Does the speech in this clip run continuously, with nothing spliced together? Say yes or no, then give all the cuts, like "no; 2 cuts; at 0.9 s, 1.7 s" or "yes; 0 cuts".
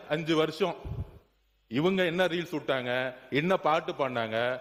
yes; 0 cuts